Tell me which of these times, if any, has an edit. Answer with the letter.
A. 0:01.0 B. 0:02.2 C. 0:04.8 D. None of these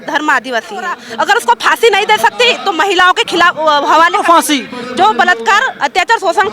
A